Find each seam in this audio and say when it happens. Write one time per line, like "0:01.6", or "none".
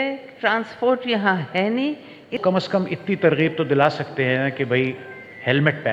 0:02.4